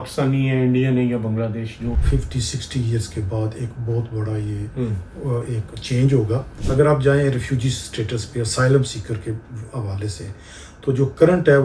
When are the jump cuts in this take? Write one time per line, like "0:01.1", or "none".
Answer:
0:02.0
0:06.5